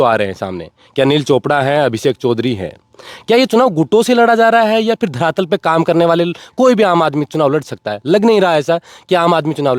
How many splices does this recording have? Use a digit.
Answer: 0